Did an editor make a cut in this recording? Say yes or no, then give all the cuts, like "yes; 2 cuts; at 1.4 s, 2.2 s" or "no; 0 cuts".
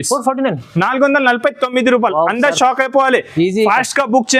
no; 0 cuts